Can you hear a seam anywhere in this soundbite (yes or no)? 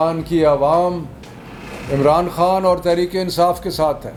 no